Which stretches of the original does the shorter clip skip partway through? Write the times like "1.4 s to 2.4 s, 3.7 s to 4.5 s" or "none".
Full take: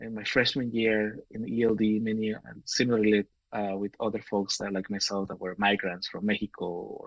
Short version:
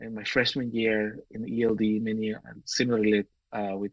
none